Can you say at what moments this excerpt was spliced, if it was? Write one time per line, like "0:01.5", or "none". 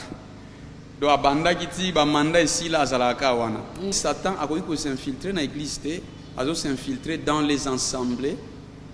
0:04.0